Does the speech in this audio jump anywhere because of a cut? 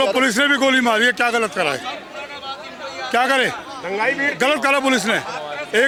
no; 0 cuts

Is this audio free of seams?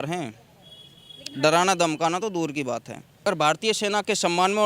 no; 1 cut; at 3.1 s

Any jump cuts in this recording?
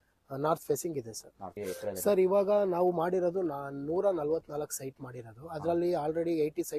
yes; 1 cut; at 1.5 s

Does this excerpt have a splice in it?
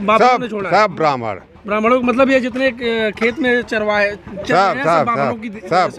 no; 0 cuts

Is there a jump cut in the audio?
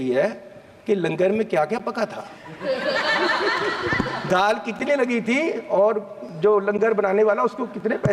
no; 0 cuts

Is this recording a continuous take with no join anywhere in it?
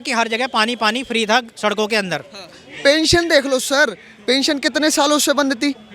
no; 1 cut; at 2.6 s

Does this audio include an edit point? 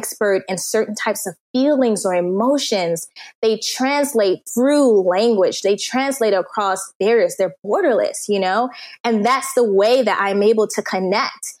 no; 0 cuts

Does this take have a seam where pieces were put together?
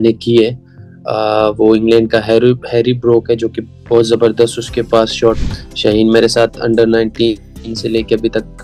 yes; 1 cut; at 5.4 s

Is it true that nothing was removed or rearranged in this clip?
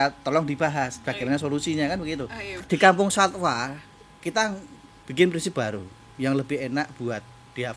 no; 1 cut; at 2.6 s

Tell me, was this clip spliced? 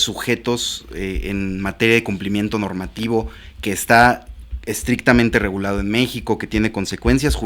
no; 0 cuts

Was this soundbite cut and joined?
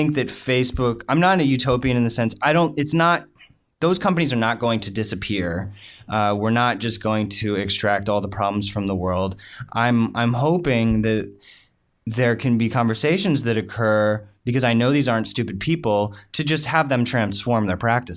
no; 0 cuts

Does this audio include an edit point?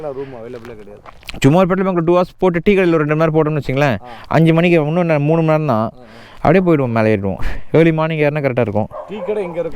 no; 0 cuts

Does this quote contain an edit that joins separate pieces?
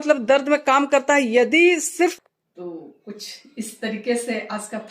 yes; 1 cut; at 2.2 s

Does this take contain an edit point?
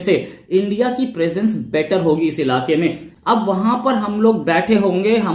yes; 1 cut; at 3.1 s

